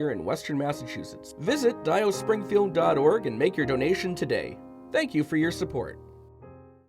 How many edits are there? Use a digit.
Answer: 1